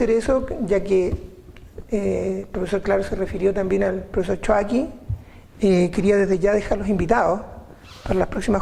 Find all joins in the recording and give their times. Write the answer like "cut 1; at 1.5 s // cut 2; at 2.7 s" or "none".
none